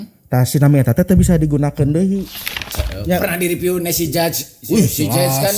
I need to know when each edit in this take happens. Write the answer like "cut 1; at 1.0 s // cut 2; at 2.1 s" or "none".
cut 1; at 2.7 s